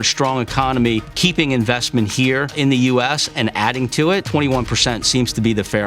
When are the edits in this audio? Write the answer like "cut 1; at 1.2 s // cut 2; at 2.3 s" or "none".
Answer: cut 1; at 1.1 s // cut 2; at 2.5 s // cut 3; at 4.3 s